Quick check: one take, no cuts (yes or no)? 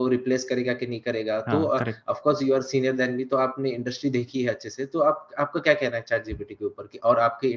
yes